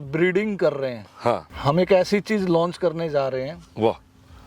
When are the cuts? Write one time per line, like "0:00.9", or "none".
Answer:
0:01.5